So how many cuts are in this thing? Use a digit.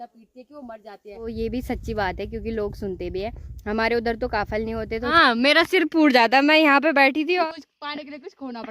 3